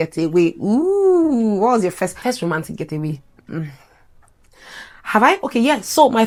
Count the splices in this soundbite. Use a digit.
0